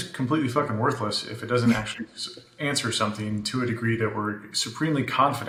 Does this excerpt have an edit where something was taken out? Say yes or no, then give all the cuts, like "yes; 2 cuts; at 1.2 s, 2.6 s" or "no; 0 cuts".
no; 0 cuts